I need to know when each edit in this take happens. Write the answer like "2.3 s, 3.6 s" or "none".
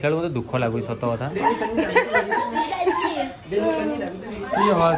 1.3 s